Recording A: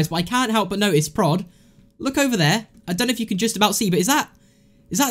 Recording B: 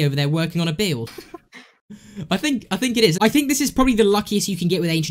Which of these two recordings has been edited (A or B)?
B